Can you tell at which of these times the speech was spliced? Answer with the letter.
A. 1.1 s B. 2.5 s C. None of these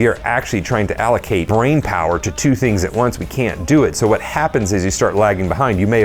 A